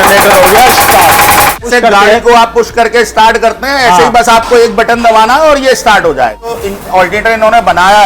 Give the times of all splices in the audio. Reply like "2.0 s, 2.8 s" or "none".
1.6 s, 6.5 s

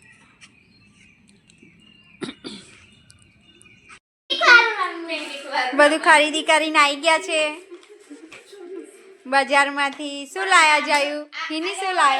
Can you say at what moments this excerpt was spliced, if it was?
4.1 s

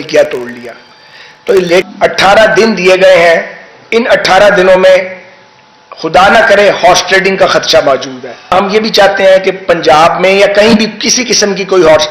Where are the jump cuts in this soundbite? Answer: 1.8 s, 8.5 s

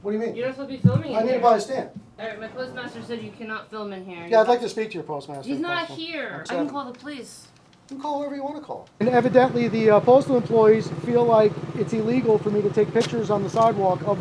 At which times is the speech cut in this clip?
2.1 s, 6.4 s, 9.0 s

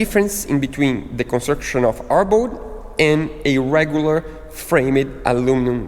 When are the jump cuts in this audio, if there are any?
none

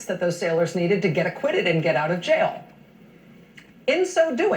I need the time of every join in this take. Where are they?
2.5 s

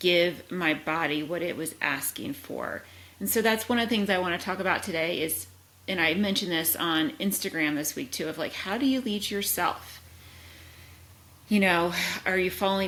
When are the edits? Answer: none

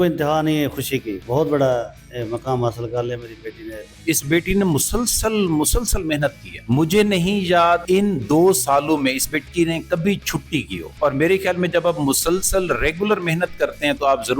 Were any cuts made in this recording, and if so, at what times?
1.2 s, 4.0 s, 6.5 s, 7.8 s, 10.8 s

